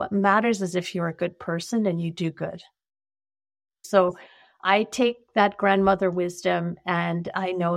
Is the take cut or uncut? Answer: cut